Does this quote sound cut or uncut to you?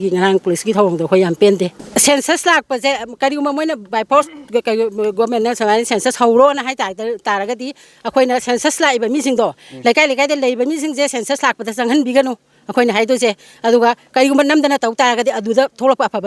cut